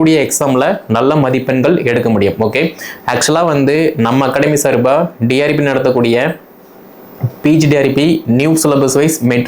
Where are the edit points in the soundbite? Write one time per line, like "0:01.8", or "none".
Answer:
none